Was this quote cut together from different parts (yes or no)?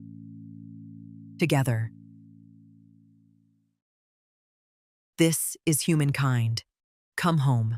yes